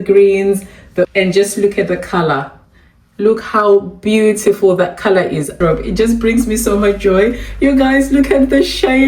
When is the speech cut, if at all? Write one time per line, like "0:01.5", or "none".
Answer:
0:01.1
0:05.6